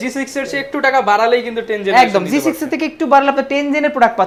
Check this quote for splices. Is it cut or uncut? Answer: uncut